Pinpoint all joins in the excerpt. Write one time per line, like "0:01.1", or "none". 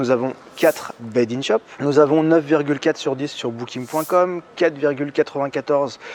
0:01.7